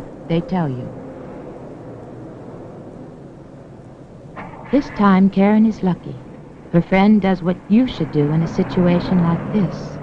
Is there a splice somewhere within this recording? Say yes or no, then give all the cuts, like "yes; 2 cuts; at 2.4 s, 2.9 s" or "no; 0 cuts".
no; 0 cuts